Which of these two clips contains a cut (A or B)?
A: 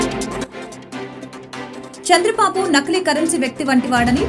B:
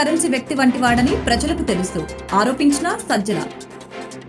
A